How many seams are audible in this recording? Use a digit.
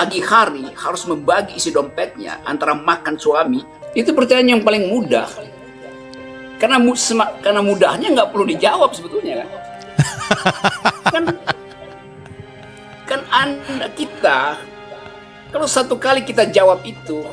1